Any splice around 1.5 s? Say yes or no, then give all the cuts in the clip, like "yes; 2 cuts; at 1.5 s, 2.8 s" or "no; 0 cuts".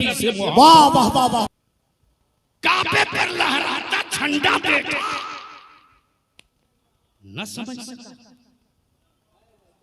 yes; 1 cut; at 1.5 s